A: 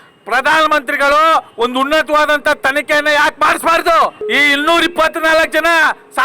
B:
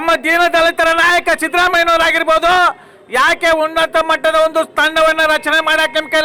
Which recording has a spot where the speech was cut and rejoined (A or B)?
A